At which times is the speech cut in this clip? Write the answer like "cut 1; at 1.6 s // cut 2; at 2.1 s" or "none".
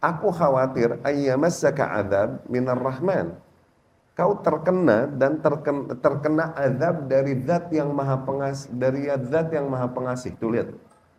none